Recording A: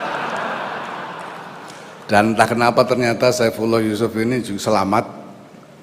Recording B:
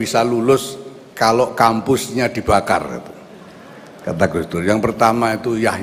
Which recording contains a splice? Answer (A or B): A